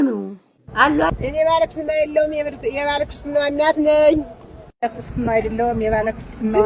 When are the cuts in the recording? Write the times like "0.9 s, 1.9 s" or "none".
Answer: 1.1 s